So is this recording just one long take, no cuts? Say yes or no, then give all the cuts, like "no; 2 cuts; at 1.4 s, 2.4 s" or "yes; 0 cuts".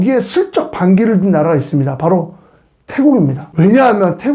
yes; 0 cuts